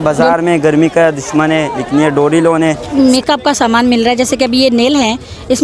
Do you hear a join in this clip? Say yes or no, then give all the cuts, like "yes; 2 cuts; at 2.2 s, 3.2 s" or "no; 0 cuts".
yes; 1 cut; at 2.8 s